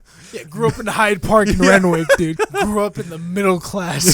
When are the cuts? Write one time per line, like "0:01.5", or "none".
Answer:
0:02.3